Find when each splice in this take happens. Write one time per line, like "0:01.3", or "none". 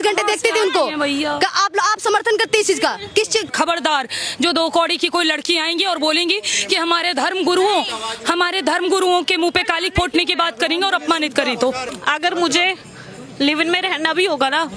0:03.5
0:12.0